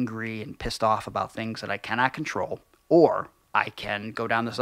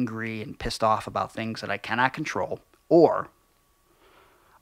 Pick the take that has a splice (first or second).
first